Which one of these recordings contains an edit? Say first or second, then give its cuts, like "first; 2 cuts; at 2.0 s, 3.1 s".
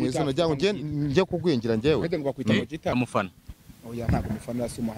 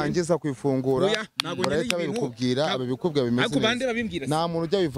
first; 1 cut; at 2.9 s